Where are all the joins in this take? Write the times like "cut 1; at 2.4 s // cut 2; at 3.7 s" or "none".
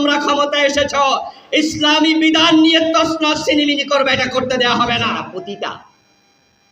cut 1; at 5.2 s